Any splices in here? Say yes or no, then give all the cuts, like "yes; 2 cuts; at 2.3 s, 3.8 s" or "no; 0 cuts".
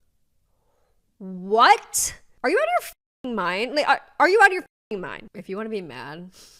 yes; 1 cut; at 5.2 s